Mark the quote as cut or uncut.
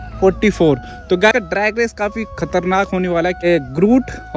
cut